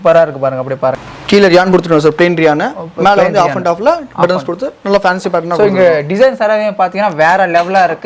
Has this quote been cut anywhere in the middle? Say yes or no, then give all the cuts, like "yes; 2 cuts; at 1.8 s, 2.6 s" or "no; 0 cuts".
yes; 1 cut; at 1.1 s